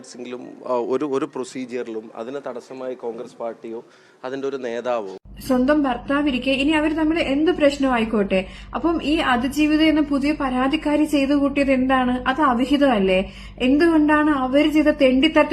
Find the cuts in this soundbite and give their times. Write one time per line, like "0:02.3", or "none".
0:05.3